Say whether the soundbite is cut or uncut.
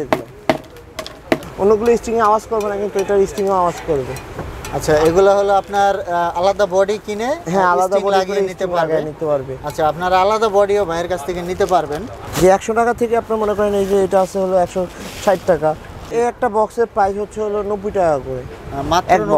cut